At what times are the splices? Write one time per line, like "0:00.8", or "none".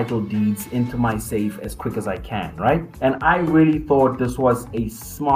0:02.9